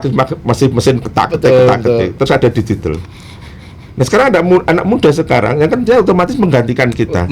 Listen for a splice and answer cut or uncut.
uncut